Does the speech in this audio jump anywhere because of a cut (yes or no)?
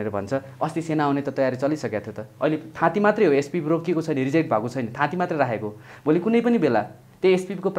no